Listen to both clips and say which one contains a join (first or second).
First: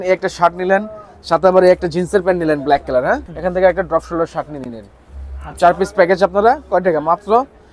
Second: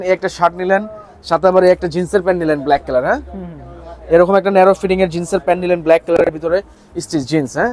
first